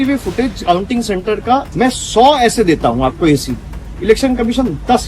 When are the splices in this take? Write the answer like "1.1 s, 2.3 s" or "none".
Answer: 1.7 s